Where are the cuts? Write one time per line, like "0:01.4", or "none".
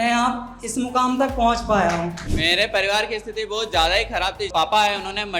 0:02.2
0:04.5